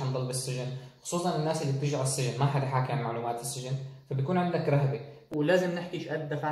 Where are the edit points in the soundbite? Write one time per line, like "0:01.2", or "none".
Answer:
0:05.2